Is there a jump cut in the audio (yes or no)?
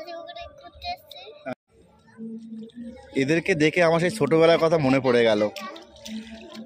yes